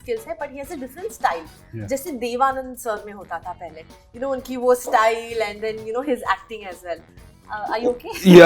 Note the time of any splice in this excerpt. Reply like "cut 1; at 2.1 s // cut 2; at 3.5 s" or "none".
none